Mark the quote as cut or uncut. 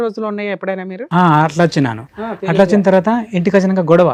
uncut